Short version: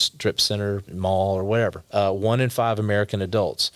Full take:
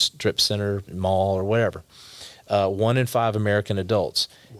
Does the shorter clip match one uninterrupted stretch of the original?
no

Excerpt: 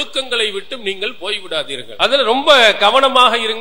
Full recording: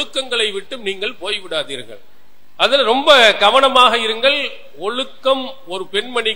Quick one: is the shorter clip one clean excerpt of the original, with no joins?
no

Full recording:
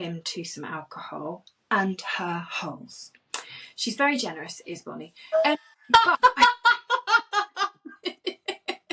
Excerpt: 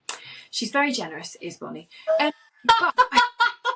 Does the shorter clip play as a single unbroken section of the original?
yes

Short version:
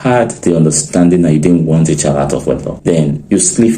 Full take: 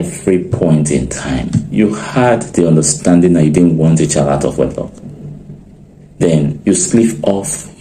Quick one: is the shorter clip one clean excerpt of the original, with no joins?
no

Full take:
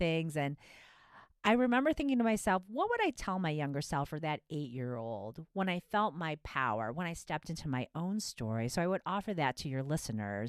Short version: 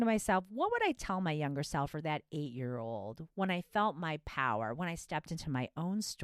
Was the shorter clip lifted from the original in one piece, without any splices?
yes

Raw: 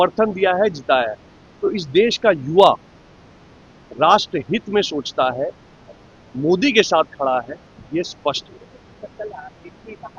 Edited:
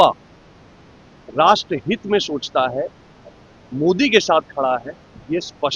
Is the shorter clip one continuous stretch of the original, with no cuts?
yes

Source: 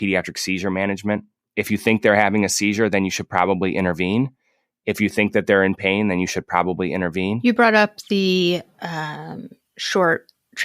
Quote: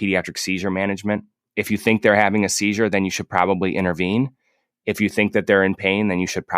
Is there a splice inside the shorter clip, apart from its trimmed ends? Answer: no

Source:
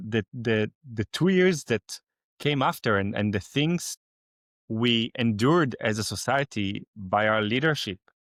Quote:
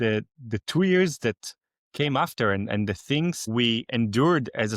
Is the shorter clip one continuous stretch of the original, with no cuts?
no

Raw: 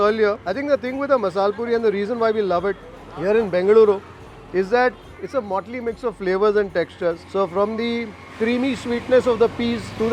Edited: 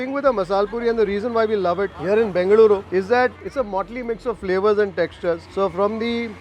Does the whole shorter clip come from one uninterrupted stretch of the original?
no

